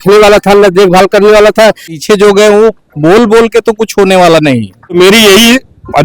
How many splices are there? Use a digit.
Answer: 2